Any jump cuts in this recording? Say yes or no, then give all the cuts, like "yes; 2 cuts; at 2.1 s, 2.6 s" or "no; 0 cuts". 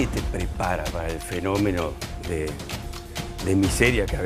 no; 0 cuts